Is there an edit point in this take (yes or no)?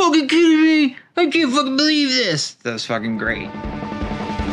yes